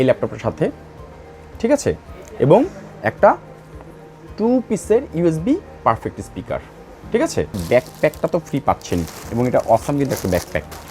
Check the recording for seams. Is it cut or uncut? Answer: cut